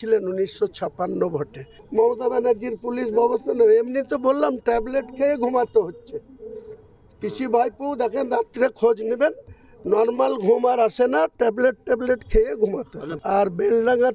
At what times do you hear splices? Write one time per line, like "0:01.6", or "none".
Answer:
0:01.8
0:13.1